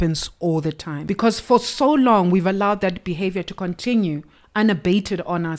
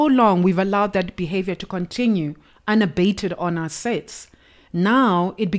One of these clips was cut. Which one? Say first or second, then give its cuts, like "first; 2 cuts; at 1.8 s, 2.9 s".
first; 1 cut; at 0.9 s